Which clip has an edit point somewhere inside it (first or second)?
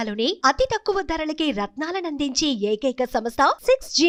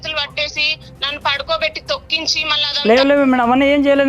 second